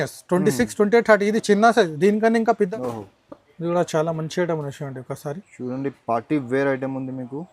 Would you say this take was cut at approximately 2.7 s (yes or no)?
yes